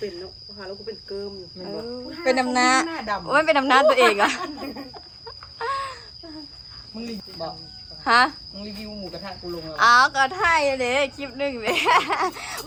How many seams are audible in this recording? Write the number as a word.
zero